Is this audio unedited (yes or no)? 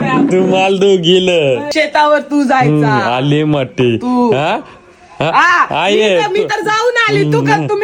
yes